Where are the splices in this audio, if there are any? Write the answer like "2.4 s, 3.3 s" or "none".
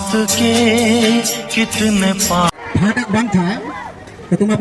2.5 s